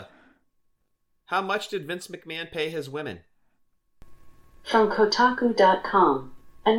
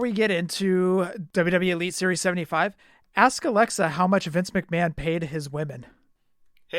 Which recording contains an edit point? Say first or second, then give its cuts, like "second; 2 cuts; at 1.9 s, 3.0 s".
second; 1 cut; at 1.2 s